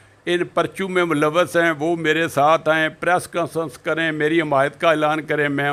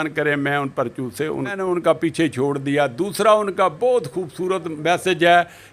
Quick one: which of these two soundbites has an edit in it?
second; 1 cut; at 1.5 s

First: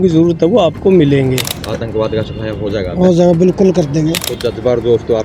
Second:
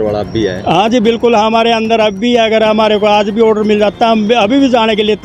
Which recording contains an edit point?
first; 2 cuts; at 1.6 s, 4.3 s

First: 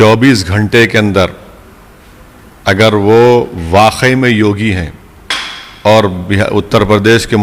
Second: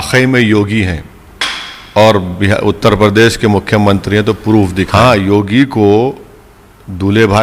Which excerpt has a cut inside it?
second; 1 cut; at 4.9 s

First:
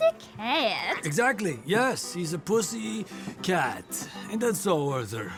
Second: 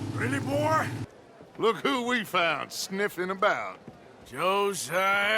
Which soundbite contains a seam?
second; 1 cut; at 1.1 s

